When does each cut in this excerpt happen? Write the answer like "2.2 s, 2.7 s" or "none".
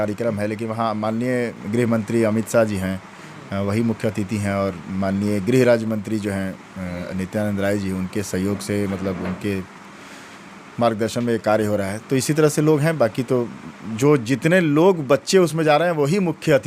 none